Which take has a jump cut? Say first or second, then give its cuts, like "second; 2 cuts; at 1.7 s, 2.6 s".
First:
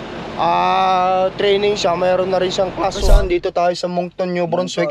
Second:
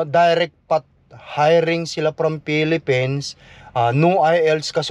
first; 1 cut; at 3.1 s